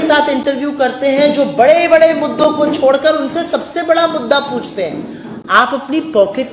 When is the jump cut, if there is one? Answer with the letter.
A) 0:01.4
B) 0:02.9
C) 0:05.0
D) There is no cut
D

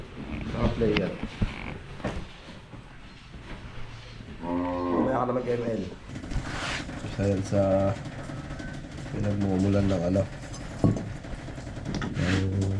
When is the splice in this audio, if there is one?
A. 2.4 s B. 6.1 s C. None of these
B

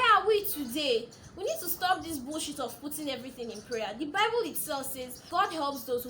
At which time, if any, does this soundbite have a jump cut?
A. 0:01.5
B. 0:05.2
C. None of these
B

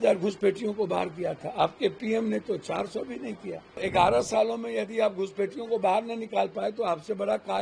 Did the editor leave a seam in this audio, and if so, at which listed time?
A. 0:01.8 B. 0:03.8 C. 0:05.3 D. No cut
B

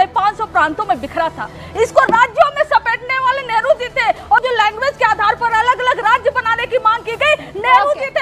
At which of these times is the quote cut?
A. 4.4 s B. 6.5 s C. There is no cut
A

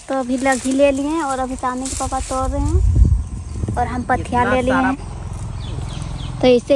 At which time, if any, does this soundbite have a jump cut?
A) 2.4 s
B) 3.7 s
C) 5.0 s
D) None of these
C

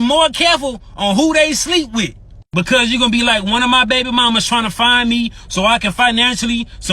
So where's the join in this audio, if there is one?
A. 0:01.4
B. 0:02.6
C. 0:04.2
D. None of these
B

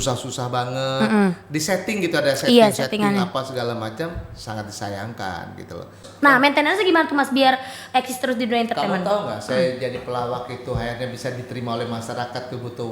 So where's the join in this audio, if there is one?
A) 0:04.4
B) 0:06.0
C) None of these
B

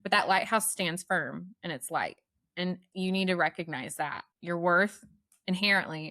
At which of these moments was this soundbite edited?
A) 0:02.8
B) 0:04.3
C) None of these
B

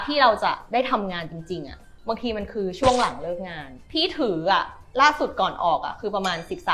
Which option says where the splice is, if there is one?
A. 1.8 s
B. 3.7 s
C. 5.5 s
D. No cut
D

